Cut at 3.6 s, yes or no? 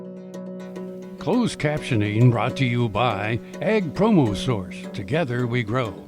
no